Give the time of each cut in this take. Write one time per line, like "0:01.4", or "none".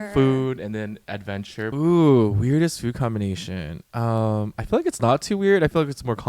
0:01.7